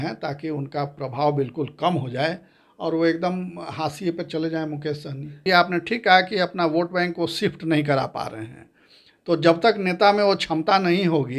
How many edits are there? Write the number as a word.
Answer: one